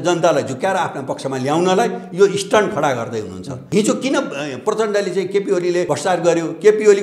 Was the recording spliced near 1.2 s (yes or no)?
no